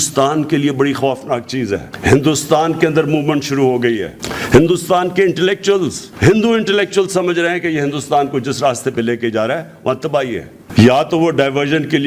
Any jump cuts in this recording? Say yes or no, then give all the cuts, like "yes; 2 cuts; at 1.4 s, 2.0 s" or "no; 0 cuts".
yes; 2 cuts; at 1.9 s, 10.6 s